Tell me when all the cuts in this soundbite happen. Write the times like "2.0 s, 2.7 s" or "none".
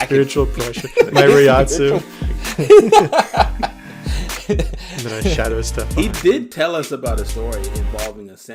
none